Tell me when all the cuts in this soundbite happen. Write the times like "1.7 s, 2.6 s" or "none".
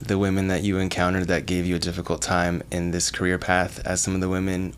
none